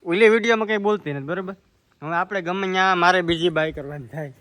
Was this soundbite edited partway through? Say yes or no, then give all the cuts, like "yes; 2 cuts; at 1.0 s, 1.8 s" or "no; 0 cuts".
no; 0 cuts